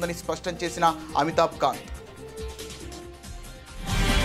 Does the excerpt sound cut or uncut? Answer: cut